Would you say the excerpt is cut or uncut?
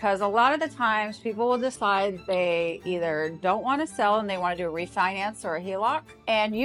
uncut